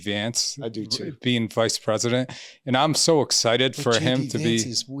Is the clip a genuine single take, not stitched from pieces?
yes; 0 cuts

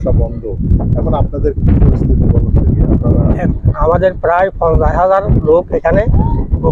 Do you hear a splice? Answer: yes; 1 cut; at 3.5 s

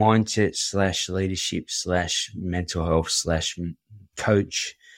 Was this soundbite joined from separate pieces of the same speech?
no; 0 cuts

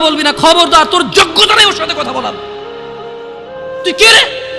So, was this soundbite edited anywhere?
yes; 2 cuts; at 2.5 s, 3.8 s

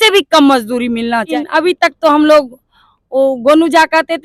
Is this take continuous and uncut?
no; 1 cut; at 1.3 s

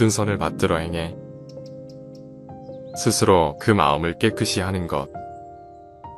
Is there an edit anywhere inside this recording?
no; 0 cuts

